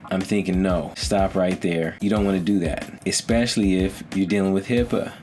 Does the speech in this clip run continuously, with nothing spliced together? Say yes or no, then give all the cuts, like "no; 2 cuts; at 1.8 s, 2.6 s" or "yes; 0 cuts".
no; 3 cuts; at 1.0 s, 2.0 s, 2.9 s